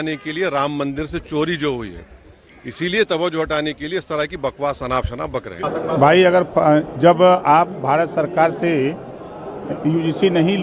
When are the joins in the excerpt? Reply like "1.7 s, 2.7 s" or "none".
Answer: 5.7 s